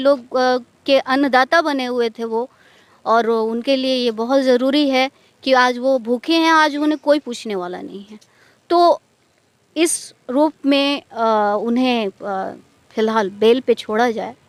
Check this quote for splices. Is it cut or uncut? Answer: uncut